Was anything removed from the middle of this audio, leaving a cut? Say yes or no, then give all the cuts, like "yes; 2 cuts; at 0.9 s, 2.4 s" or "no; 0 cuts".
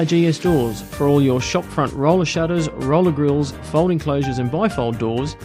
no; 0 cuts